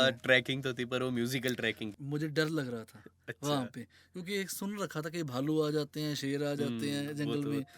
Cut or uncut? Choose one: cut